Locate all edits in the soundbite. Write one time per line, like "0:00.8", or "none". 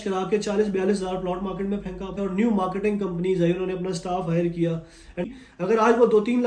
0:02.1
0:05.3